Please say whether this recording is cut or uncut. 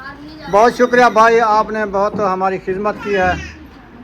uncut